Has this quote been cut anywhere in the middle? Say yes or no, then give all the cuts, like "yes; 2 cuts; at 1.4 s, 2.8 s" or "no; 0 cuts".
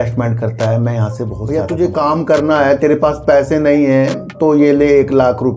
yes; 1 cut; at 1.3 s